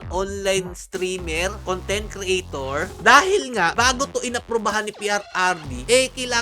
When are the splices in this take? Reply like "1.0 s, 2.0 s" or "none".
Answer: 2.9 s